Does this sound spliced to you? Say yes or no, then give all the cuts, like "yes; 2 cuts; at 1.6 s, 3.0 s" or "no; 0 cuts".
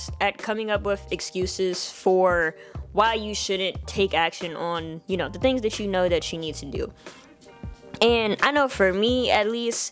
no; 0 cuts